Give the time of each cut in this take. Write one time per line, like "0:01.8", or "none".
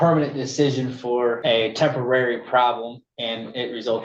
0:01.4